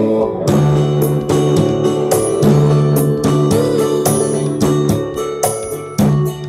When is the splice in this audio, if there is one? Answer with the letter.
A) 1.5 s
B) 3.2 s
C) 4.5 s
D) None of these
D